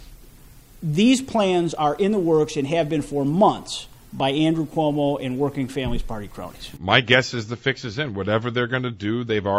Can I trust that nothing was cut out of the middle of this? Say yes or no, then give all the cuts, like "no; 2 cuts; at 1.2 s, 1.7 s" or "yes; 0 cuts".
no; 1 cut; at 6.6 s